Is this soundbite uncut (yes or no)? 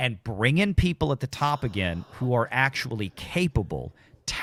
yes